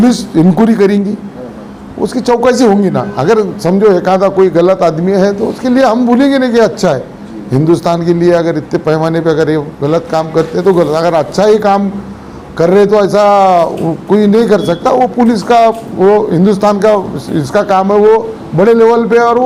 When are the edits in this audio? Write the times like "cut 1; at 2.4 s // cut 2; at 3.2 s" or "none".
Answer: none